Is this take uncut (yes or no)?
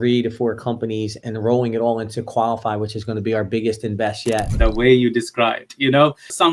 no